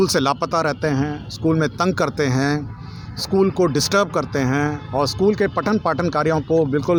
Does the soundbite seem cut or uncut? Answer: uncut